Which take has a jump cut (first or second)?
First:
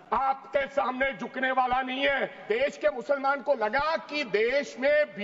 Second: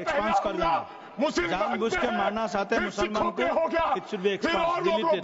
first